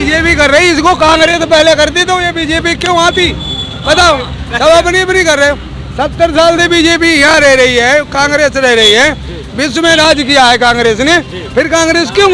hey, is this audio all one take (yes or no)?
yes